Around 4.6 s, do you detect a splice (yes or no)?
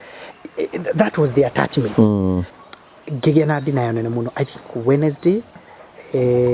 no